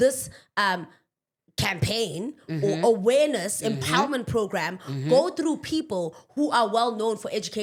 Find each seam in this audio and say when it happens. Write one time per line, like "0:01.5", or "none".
none